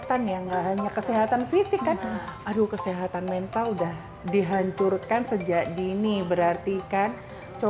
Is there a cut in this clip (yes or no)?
no